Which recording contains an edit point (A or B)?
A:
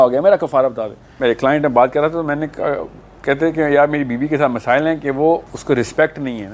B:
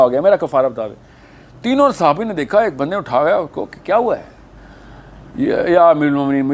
A